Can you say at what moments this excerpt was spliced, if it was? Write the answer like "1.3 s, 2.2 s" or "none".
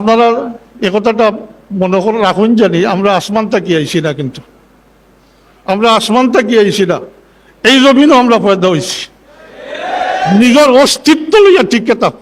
none